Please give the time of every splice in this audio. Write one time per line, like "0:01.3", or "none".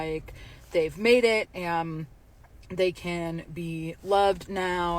0:01.8

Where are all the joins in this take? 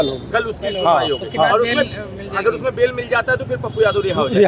none

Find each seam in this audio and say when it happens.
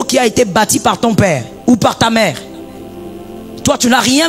0:01.5

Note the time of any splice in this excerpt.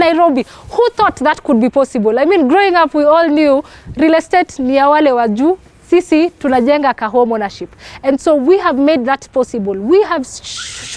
none

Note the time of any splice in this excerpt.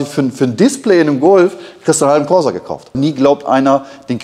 0:03.0

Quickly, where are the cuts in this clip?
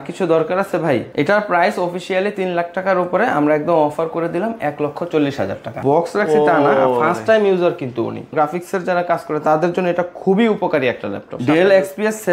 0:01.1
0:05.7
0:08.3
0:11.4

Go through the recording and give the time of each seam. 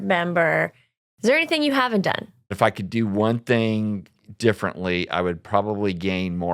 0:02.5

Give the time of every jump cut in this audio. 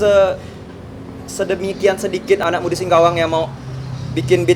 0:02.4

